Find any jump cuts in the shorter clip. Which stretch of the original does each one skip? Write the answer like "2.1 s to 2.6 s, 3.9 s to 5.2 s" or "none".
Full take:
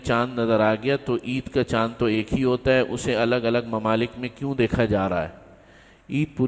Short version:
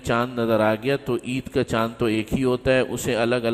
none